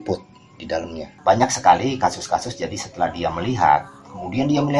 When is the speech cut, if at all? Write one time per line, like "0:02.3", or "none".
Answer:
0:01.0